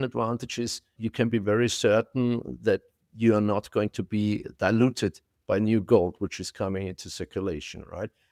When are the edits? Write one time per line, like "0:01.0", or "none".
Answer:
0:01.0